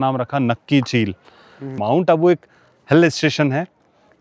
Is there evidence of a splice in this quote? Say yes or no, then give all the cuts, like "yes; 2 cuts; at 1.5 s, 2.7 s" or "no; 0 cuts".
yes; 1 cut; at 1.8 s